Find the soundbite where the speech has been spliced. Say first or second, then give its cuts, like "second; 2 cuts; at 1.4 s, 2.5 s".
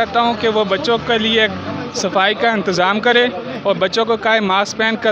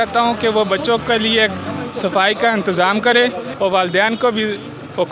second; 1 cut; at 3.4 s